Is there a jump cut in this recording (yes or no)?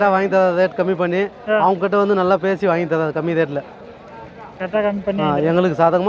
no